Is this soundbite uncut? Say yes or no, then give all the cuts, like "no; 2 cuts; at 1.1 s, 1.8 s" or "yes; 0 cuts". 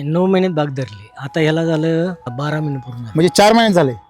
no; 1 cut; at 2.4 s